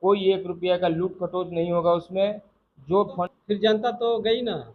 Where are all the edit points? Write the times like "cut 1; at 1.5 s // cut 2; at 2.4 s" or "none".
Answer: cut 1; at 3.2 s